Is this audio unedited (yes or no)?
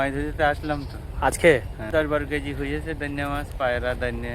no